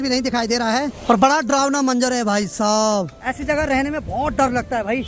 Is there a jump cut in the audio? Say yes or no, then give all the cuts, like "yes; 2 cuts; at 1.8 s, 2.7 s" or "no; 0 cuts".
no; 0 cuts